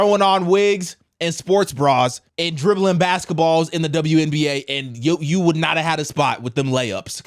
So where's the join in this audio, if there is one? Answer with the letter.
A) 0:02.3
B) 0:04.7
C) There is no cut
A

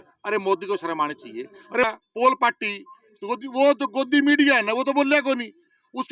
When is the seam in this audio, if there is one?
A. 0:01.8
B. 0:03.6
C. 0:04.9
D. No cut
A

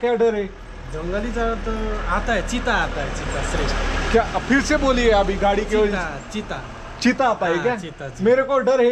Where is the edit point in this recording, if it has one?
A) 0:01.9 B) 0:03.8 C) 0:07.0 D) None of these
D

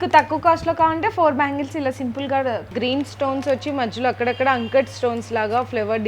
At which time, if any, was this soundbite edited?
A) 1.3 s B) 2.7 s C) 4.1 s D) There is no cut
B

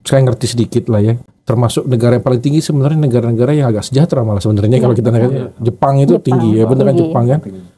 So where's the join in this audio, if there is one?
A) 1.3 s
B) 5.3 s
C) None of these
A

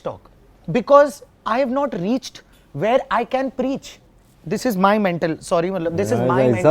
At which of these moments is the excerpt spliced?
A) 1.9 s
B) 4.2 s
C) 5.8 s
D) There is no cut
D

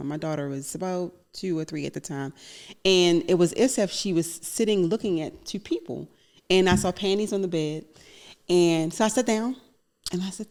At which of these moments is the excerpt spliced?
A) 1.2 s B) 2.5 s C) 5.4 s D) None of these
D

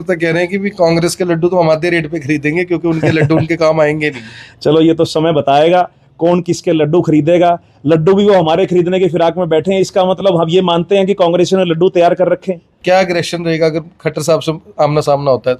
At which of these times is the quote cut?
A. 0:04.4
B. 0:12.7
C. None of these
B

